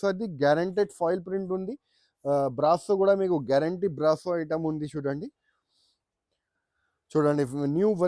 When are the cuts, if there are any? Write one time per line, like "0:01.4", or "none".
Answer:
none